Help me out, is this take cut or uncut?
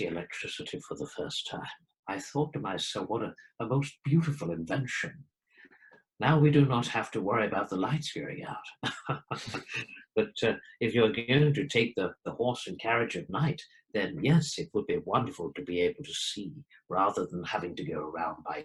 uncut